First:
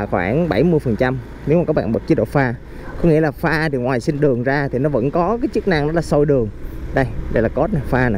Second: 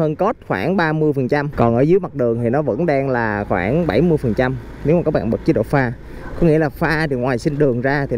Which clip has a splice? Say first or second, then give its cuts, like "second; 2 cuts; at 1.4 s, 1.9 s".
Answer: second; 1 cut; at 1.5 s